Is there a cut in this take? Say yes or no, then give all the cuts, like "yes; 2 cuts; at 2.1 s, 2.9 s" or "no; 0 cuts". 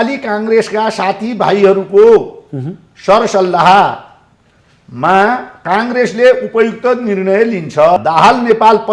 yes; 1 cut; at 8.0 s